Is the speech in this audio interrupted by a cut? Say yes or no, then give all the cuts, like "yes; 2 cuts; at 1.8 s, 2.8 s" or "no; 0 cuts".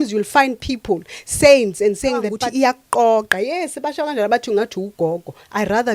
yes; 1 cut; at 2.4 s